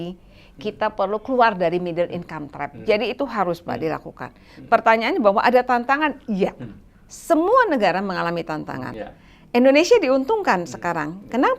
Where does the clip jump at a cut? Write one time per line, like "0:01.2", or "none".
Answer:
0:08.9

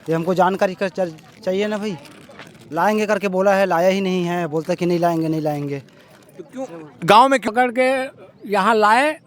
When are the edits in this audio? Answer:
0:02.5
0:07.5

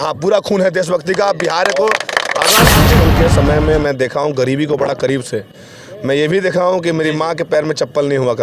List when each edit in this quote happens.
0:02.9

